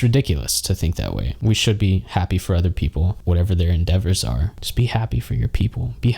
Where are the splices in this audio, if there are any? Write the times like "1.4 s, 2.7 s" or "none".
1.3 s, 4.5 s